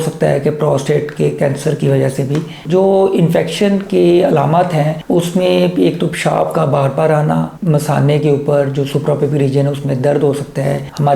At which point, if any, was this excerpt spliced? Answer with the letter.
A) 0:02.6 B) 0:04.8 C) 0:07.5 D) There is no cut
A